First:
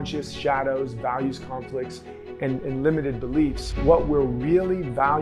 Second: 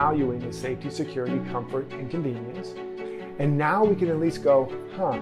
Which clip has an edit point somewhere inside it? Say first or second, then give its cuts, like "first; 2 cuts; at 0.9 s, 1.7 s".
first; 1 cut; at 3.7 s